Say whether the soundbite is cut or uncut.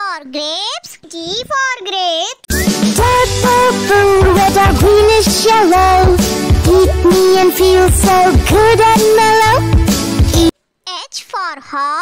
uncut